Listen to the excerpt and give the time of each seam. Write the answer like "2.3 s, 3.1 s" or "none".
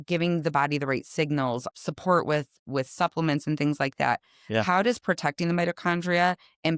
1.7 s